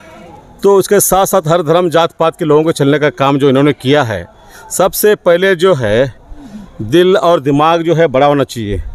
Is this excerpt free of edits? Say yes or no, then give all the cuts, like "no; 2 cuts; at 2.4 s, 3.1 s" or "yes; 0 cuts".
yes; 0 cuts